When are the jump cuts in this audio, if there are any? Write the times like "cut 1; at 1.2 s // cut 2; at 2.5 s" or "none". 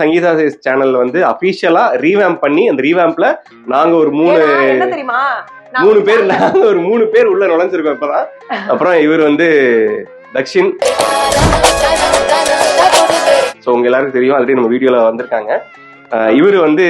none